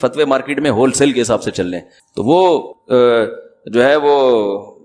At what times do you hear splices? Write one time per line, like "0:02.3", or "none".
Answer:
none